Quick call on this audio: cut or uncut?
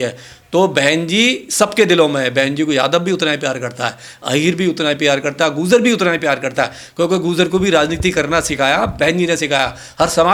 uncut